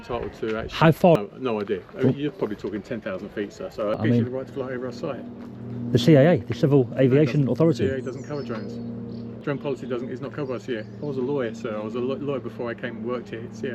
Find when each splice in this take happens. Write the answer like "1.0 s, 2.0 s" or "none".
1.2 s, 4.0 s, 9.4 s